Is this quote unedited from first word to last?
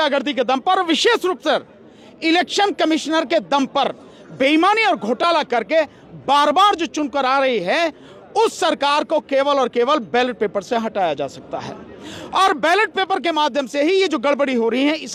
yes; 0 cuts

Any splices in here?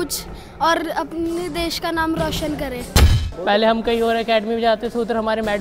yes; 1 cut; at 3.2 s

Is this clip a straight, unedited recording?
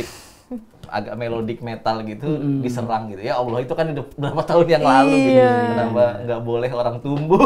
yes; 0 cuts

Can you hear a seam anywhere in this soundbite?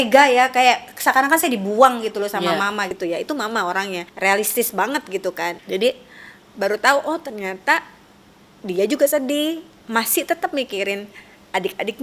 yes; 4 cuts; at 2.9 s, 4.1 s, 5.6 s, 9.7 s

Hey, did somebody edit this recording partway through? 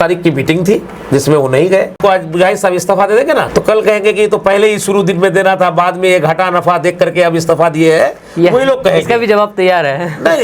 yes; 2 cuts; at 2.0 s, 3.5 s

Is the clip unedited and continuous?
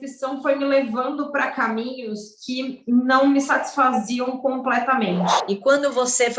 no; 1 cut; at 5.5 s

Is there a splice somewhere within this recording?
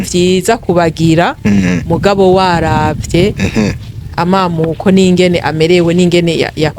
no; 0 cuts

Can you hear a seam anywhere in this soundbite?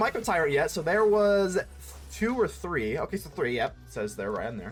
no; 0 cuts

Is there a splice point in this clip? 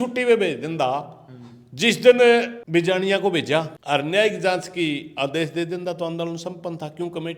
yes; 2 cuts; at 2.6 s, 3.8 s

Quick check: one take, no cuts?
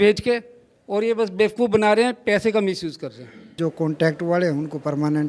no; 1 cut; at 3.6 s

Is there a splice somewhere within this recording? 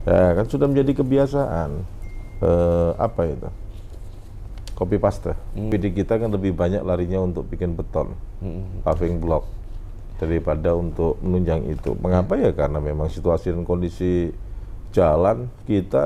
yes; 1 cut; at 5.7 s

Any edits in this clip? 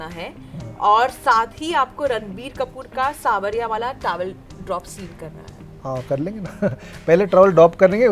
no; 0 cuts

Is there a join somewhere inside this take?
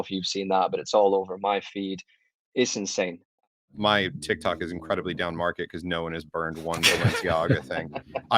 yes; 1 cut; at 3.4 s

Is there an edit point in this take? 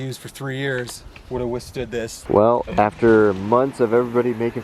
yes; 1 cut; at 2.2 s

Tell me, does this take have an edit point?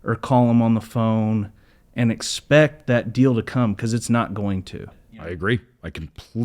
yes; 1 cut; at 5.1 s

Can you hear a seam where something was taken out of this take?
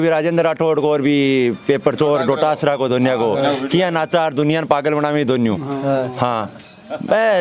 no; 0 cuts

